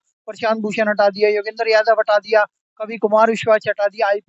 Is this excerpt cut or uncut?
uncut